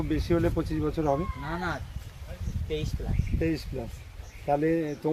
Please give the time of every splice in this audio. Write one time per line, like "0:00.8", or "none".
none